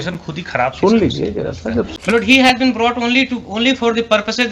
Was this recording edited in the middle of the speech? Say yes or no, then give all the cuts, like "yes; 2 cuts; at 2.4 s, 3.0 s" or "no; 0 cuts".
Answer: yes; 1 cut; at 1.9 s